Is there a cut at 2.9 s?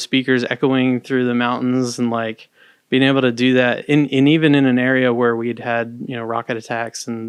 no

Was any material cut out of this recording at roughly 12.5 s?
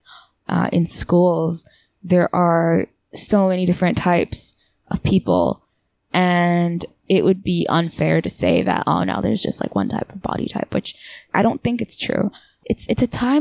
yes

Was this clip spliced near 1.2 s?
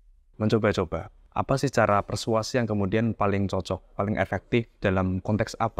yes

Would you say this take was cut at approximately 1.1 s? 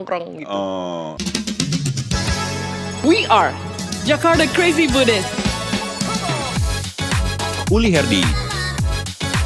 yes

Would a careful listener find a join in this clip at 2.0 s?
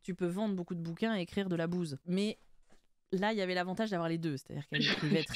yes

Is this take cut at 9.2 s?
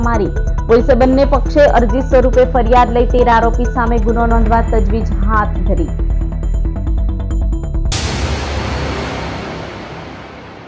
no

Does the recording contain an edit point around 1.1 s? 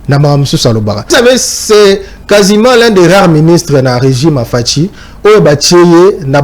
yes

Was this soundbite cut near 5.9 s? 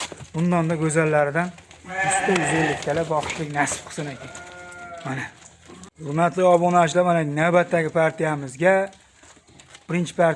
yes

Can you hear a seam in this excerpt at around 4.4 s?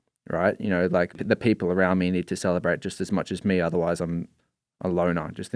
no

